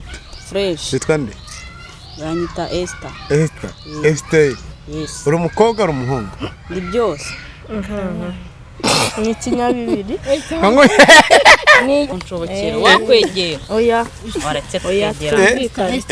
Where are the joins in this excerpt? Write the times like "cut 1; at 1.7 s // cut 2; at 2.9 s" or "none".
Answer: cut 1; at 12.1 s